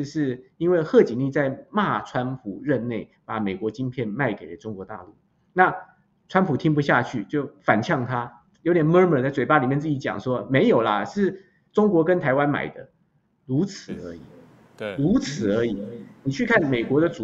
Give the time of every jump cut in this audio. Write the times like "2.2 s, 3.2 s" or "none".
none

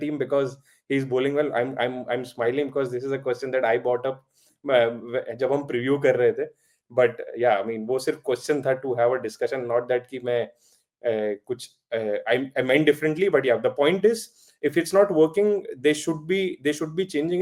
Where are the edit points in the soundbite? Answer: none

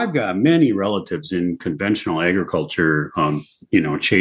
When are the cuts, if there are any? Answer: none

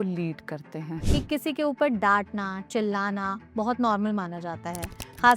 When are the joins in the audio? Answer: 1.0 s

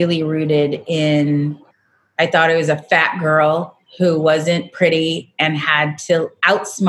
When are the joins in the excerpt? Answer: none

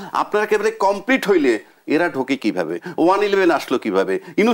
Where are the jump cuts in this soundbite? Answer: none

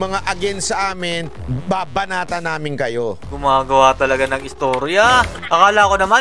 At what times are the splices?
3.2 s

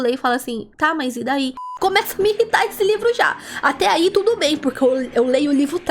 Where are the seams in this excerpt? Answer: 1.6 s

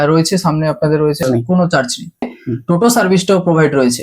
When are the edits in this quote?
1.2 s, 2.3 s

